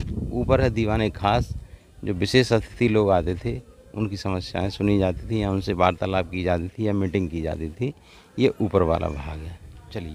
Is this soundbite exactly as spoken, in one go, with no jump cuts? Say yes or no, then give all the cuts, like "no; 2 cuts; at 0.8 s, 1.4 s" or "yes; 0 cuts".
yes; 0 cuts